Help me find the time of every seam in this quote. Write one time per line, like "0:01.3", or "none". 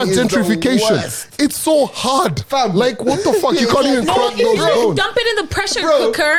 none